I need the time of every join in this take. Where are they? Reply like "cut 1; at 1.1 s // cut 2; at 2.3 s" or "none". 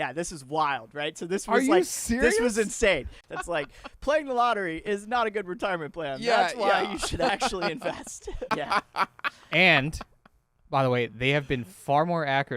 cut 1; at 3.2 s // cut 2; at 8.5 s